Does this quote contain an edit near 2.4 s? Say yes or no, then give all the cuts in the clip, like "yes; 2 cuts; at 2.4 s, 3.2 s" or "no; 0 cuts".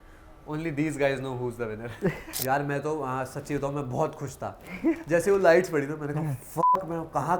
yes; 1 cut; at 2.4 s